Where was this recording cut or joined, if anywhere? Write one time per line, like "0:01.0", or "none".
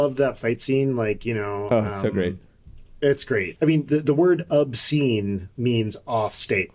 0:03.5